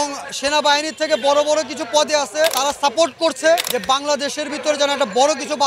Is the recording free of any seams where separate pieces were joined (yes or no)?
no